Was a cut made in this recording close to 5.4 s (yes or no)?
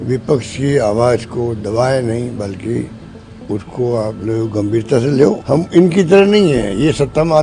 yes